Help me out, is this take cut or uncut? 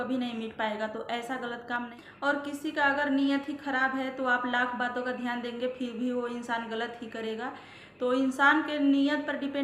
cut